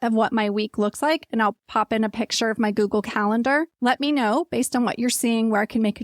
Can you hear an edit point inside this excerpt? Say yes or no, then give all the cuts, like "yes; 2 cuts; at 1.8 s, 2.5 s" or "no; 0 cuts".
yes; 1 cut; at 3.7 s